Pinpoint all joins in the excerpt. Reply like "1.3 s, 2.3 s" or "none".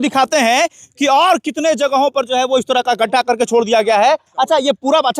4.3 s

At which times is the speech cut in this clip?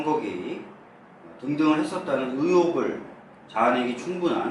1.2 s

